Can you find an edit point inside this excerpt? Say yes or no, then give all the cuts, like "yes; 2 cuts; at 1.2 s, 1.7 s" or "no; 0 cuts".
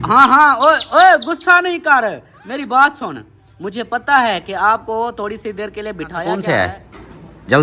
yes; 1 cut; at 6.2 s